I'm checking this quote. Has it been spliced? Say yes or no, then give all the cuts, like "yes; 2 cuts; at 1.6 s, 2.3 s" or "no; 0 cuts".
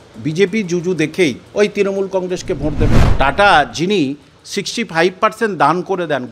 yes; 2 cuts; at 1.4 s, 3.0 s